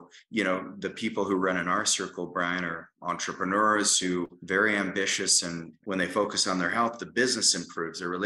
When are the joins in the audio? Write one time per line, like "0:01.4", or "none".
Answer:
0:04.4
0:05.7